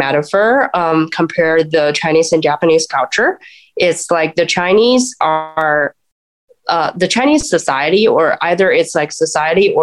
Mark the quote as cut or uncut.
uncut